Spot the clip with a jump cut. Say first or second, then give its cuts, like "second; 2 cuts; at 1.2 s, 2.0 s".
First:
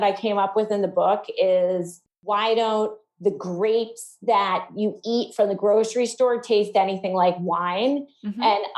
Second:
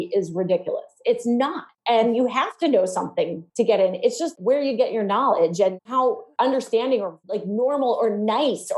second; 5 cuts; at 1.7 s, 3.4 s, 4.3 s, 5.8 s, 7.3 s